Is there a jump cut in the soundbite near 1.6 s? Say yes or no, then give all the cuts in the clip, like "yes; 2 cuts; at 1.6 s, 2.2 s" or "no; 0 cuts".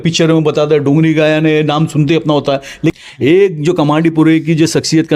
no; 1 cut; at 2.9 s